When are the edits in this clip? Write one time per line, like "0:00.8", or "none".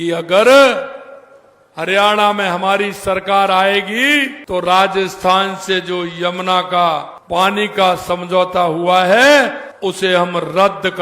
0:04.4
0:07.1
0:09.7